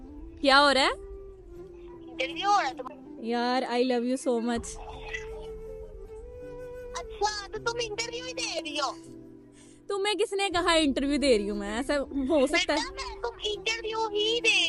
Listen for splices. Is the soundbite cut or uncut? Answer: cut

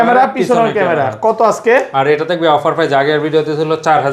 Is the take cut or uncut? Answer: uncut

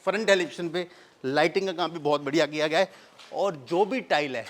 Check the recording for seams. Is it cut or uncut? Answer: uncut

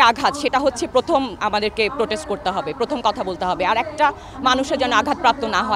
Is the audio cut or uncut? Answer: uncut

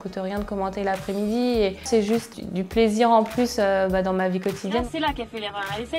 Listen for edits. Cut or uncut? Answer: cut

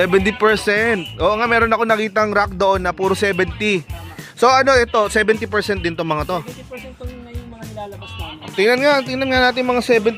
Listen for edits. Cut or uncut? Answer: uncut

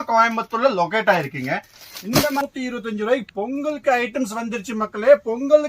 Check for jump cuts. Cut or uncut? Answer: cut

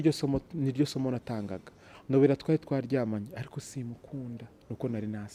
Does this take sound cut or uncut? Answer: uncut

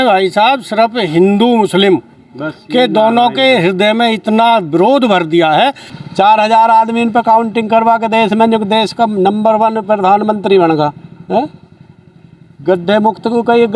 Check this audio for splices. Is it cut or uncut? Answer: cut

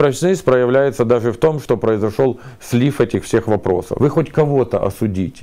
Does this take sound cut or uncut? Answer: cut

